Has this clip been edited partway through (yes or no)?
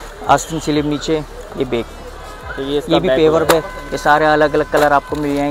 yes